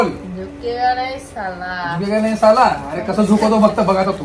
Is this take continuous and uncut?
yes; 0 cuts

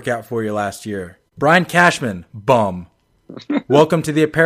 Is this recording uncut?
no; 1 cut; at 1.2 s

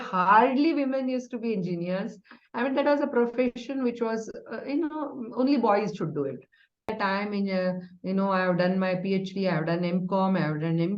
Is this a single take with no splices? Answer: no; 1 cut; at 6.9 s

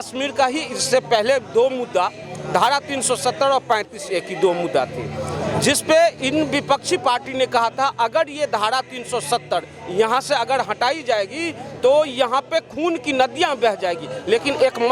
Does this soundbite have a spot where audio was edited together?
no; 0 cuts

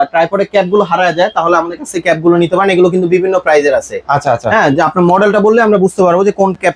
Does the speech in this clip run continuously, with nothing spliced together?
yes; 0 cuts

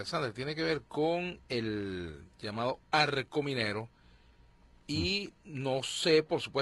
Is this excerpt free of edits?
no; 1 cut; at 2.9 s

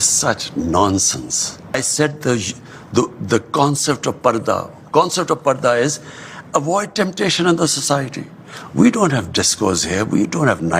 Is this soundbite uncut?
no; 1 cut; at 1.7 s

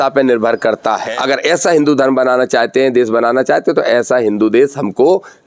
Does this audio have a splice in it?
yes; 1 cut; at 1.1 s

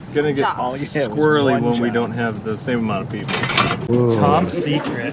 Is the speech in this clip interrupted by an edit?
yes; 1 cut; at 3.9 s

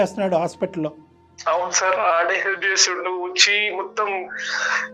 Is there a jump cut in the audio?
no; 0 cuts

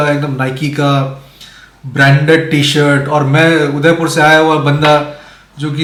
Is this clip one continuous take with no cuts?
yes; 0 cuts

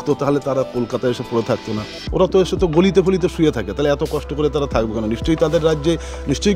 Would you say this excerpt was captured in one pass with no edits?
yes; 0 cuts

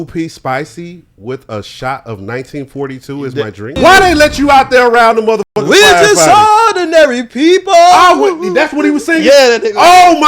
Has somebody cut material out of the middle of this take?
yes; 1 cut; at 3.7 s

